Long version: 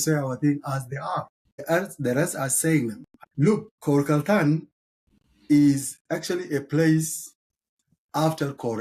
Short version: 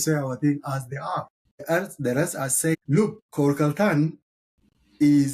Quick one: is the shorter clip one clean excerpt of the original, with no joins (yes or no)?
no